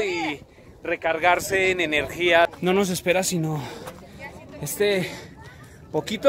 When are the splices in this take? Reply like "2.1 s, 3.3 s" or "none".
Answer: 2.5 s